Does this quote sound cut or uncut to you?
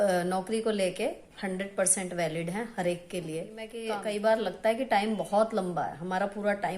cut